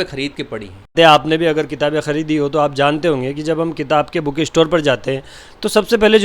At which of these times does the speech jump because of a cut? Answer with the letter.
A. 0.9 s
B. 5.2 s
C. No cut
A